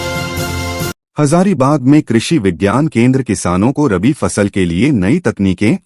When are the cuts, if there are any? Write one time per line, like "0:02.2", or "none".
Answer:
0:01.0

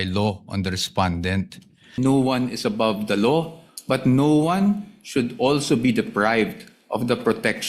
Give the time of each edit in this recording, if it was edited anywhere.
0:02.0

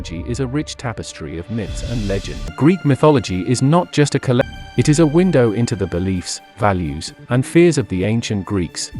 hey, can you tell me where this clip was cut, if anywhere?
0:02.5
0:04.4

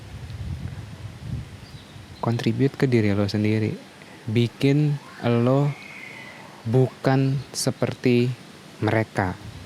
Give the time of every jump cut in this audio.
none

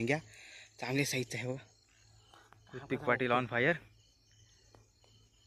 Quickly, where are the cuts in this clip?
none

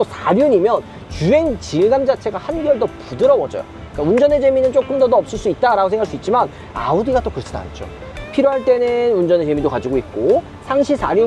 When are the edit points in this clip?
0:03.9

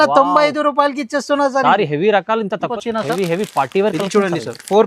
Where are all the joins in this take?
0:02.7

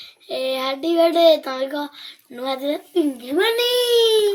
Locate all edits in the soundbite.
none

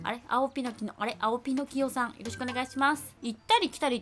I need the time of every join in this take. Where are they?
0:03.1

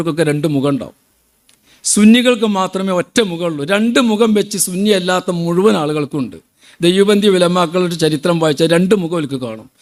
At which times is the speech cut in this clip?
none

